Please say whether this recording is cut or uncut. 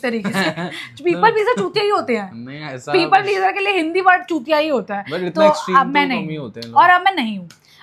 uncut